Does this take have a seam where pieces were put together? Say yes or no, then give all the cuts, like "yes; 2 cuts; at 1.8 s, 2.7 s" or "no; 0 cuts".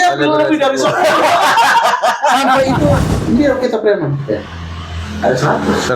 yes; 1 cut; at 3.0 s